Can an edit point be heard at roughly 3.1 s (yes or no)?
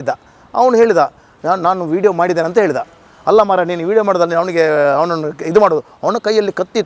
no